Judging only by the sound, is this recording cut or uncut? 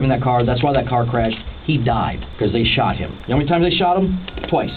cut